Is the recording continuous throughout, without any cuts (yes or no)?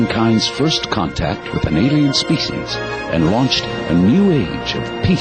yes